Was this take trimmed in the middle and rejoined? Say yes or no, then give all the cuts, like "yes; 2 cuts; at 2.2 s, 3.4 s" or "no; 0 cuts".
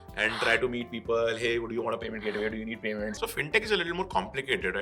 yes; 1 cut; at 3.1 s